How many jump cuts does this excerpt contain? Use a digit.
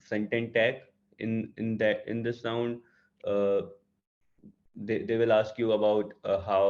0